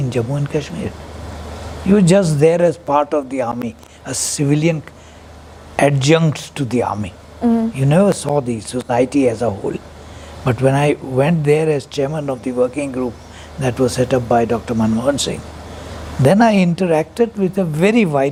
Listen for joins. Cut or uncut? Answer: uncut